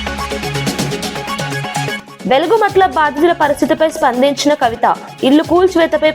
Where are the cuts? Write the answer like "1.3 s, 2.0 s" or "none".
2.0 s